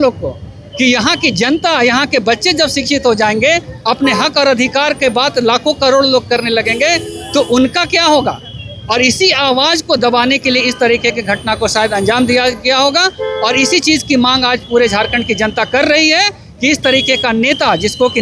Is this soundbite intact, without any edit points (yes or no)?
yes